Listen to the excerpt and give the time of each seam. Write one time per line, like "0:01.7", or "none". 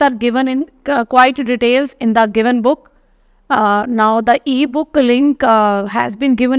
none